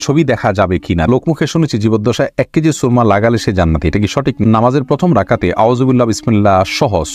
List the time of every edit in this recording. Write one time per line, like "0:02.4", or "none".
0:01.1
0:04.4